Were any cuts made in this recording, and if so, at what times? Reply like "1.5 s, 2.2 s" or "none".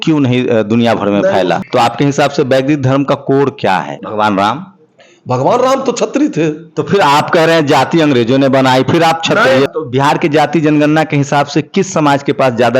1.6 s, 4.0 s, 9.7 s